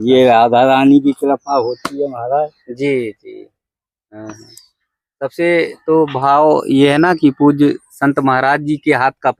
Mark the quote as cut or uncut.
uncut